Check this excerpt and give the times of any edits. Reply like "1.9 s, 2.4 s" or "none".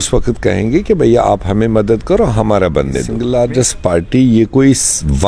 3.1 s